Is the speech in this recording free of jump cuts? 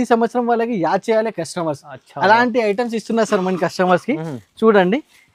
yes; 0 cuts

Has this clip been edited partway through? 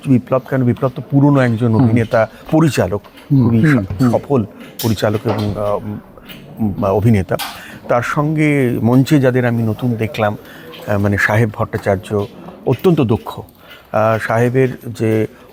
no; 0 cuts

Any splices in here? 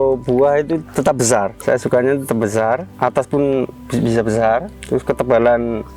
yes; 4 cuts; at 1.5 s, 2.9 s, 3.8 s, 4.8 s

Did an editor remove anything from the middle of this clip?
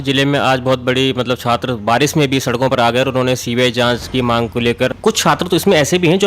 yes; 1 cut; at 5.0 s

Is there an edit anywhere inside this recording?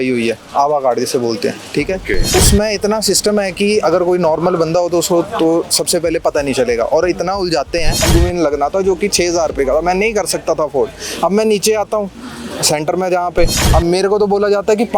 yes; 3 cuts; at 2.3 s, 8.0 s, 13.6 s

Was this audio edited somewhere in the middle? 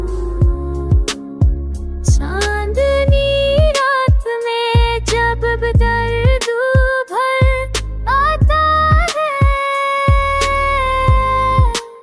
yes; 1 cut; at 7.4 s

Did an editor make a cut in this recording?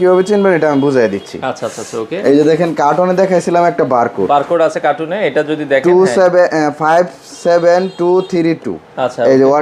no; 0 cuts

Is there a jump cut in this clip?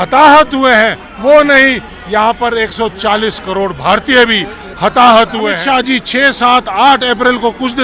yes; 1 cut; at 5.6 s

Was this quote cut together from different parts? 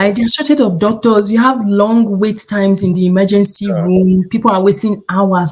no; 0 cuts

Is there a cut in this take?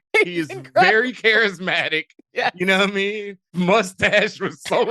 yes; 1 cut; at 3.5 s

